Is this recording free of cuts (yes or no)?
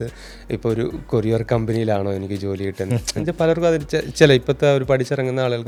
yes